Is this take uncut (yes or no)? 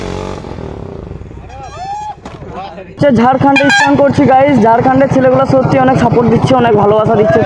yes